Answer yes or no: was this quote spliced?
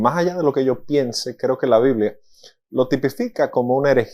no